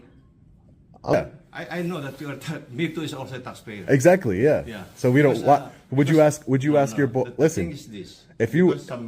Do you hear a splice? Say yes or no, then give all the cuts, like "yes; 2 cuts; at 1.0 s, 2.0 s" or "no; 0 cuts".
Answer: yes; 1 cut; at 1.1 s